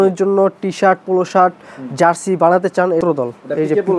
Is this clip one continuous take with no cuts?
no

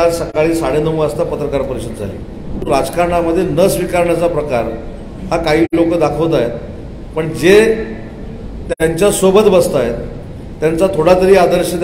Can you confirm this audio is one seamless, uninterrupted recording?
no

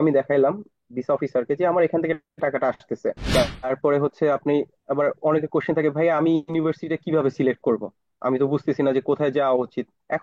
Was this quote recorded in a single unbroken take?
no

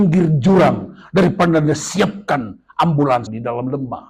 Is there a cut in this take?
no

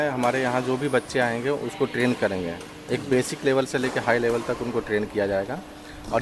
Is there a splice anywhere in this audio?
no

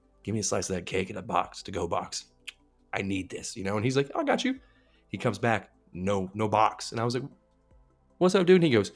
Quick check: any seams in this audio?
no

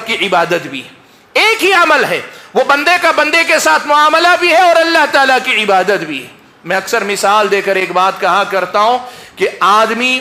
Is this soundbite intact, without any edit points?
yes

